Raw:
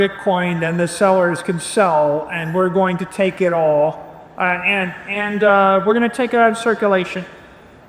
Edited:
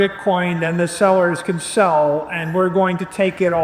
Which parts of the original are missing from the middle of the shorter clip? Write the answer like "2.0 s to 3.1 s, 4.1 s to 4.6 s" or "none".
none